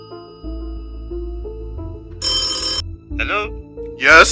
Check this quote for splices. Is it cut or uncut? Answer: cut